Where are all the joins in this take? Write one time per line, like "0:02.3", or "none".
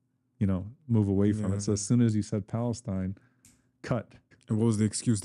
0:04.3